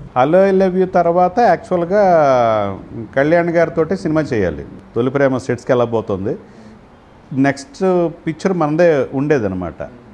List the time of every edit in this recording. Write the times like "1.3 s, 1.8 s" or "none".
4.6 s

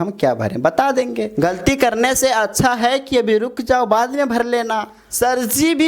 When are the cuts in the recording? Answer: 1.3 s, 5.0 s

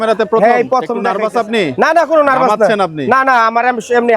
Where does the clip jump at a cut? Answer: 1.0 s

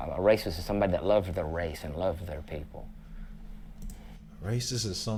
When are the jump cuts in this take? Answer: none

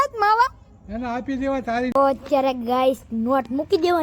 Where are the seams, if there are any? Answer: 1.9 s

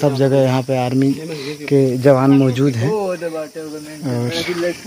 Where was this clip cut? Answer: none

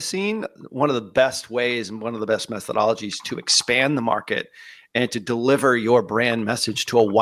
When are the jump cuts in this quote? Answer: none

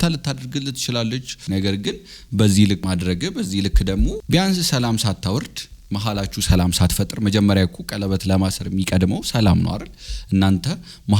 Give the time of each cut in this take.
1.3 s, 2.8 s

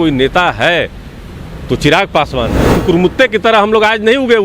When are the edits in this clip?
2.8 s

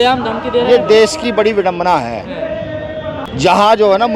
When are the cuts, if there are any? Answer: 3.2 s

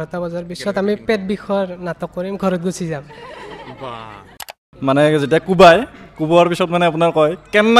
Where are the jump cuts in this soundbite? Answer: 4.5 s

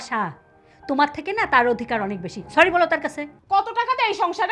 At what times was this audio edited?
3.3 s

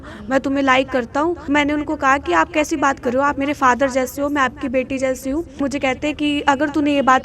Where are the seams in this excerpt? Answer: 1.4 s, 5.6 s

